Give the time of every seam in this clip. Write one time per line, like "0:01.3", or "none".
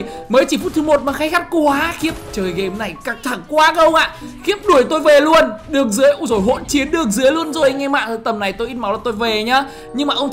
none